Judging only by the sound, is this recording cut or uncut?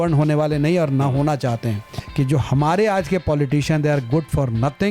cut